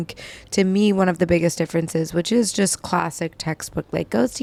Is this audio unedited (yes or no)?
yes